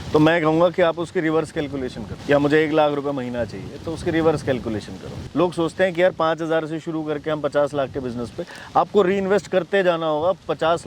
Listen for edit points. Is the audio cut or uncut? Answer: cut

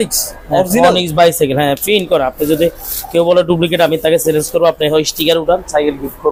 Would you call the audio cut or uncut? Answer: uncut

